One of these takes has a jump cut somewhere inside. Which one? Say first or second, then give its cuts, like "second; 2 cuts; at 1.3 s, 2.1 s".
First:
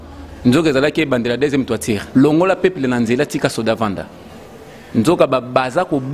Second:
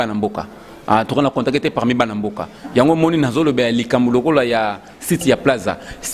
first; 1 cut; at 2.0 s